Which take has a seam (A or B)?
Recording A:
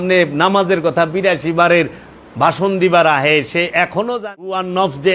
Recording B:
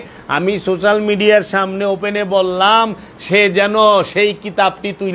A